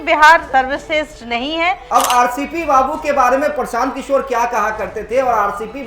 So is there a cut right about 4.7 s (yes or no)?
no